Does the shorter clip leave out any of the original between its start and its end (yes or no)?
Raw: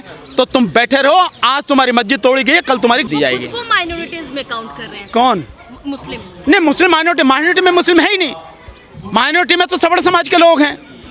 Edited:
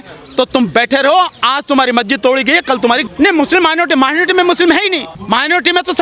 yes